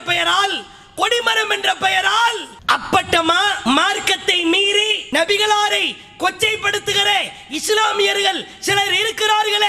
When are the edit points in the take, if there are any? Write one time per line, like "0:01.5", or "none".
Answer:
0:02.5
0:03.6
0:05.0